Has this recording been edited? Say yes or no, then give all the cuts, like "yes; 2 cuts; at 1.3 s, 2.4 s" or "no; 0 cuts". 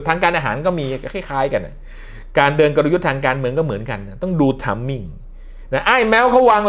no; 0 cuts